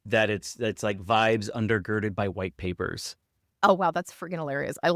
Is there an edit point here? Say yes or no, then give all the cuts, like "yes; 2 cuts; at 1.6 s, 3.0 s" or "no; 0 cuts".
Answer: yes; 1 cut; at 3.6 s